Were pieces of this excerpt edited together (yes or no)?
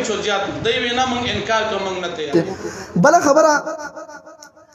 yes